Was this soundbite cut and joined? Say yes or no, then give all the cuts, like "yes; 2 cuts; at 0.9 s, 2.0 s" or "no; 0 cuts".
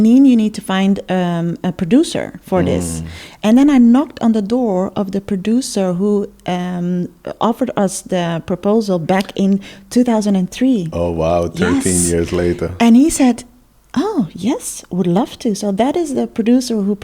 no; 0 cuts